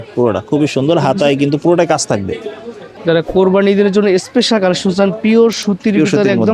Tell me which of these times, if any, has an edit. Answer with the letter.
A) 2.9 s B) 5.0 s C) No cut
A